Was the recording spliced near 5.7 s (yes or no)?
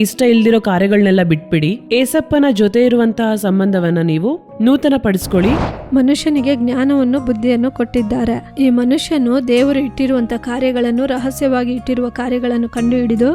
yes